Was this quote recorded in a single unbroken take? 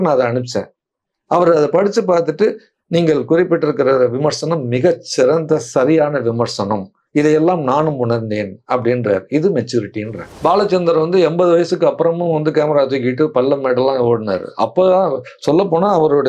no; 1 cut; at 10.2 s

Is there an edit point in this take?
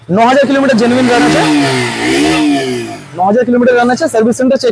no; 0 cuts

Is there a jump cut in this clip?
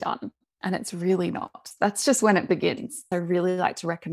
yes; 2 cuts; at 1.7 s, 3.0 s

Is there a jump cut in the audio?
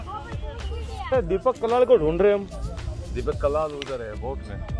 yes; 1 cut; at 1.0 s

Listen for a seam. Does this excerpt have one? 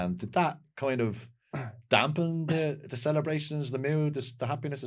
no; 0 cuts

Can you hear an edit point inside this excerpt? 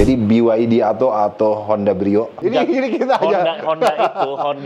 yes; 1 cut; at 2.3 s

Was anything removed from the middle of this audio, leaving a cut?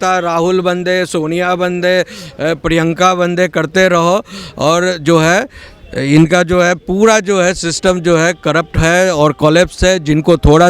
no; 0 cuts

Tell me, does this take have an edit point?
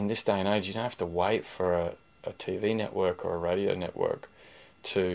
no; 0 cuts

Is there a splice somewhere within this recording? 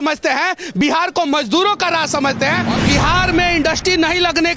yes; 1 cut; at 2.7 s

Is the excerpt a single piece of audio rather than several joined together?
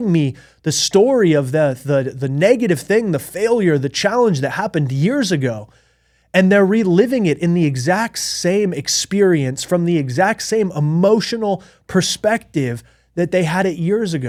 yes; 0 cuts

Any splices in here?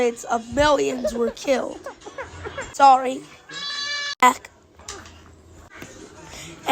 yes; 1 cut; at 4.2 s

